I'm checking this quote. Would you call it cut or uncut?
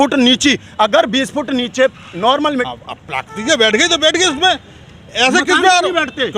cut